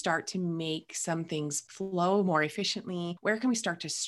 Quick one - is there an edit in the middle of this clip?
yes; 2 cuts; at 1.6 s, 3.1 s

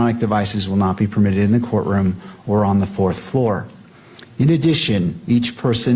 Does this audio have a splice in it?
no; 0 cuts

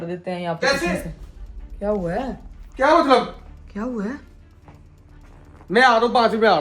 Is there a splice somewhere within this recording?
no; 0 cuts

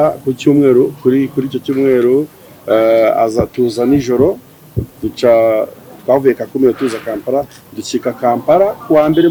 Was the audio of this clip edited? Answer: no; 0 cuts

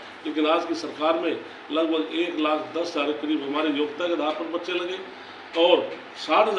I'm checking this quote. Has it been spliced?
no; 0 cuts

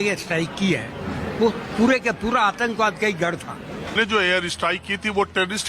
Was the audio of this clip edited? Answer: yes; 1 cut; at 3.9 s

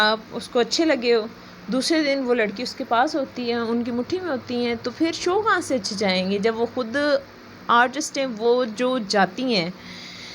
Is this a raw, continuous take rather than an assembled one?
yes; 0 cuts

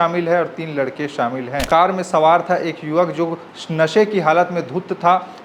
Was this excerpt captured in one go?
no; 1 cut; at 1.7 s

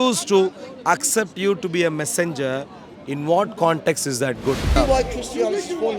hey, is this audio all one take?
no; 1 cut; at 4.8 s

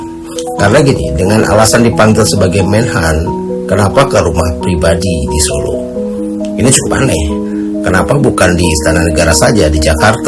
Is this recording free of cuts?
yes; 0 cuts

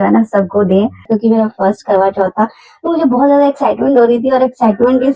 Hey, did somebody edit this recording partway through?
yes; 1 cut; at 1.0 s

